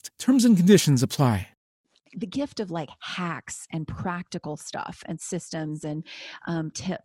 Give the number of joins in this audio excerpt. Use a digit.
1